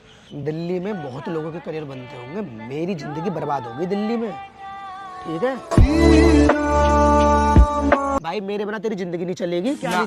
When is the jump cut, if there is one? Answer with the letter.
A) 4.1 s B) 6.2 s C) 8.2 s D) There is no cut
C